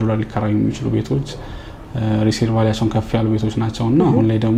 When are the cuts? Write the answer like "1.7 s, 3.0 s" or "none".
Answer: none